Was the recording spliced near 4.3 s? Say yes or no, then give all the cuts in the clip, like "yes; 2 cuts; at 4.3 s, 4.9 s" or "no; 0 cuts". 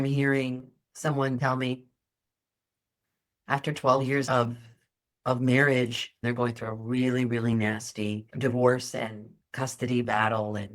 yes; 2 cuts; at 4.3 s, 8.3 s